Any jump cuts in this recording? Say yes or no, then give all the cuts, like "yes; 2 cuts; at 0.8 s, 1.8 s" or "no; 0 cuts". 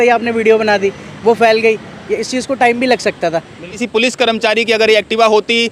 yes; 1 cut; at 3.8 s